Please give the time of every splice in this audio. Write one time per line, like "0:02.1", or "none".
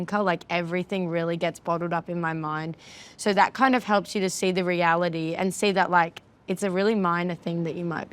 none

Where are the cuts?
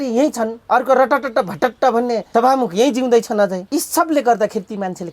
0:02.2
0:03.6

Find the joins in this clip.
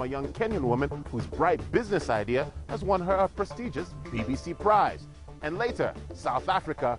0:02.4

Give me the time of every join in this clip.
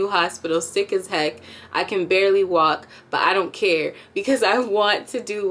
none

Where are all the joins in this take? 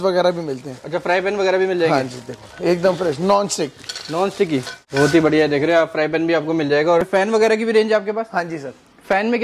0:04.8
0:07.0

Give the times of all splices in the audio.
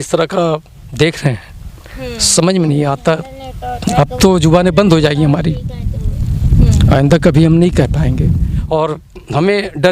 0:08.5

